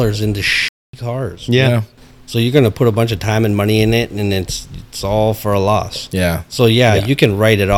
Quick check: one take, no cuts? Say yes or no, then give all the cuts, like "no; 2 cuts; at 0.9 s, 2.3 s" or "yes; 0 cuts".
no; 1 cut; at 1.9 s